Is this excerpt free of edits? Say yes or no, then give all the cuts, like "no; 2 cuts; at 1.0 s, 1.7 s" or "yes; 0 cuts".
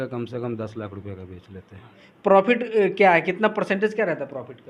no; 1 cut; at 2.0 s